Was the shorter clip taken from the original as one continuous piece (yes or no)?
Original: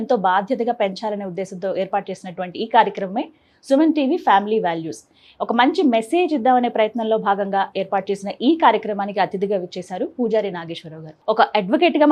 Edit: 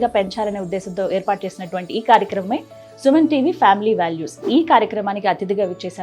no